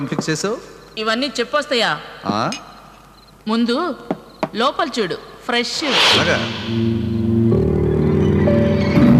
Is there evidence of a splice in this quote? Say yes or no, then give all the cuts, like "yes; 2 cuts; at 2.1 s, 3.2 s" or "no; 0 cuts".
no; 0 cuts